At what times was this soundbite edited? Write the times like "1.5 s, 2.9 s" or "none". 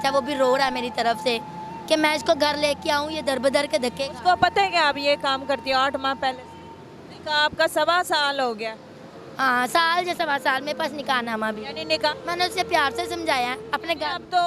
12.1 s